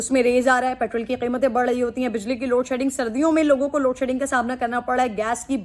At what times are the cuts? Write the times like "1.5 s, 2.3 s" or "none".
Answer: none